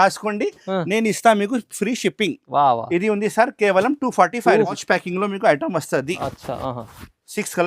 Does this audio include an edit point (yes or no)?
yes